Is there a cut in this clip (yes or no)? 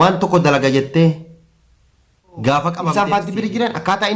yes